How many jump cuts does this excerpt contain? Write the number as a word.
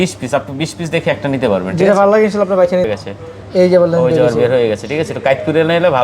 one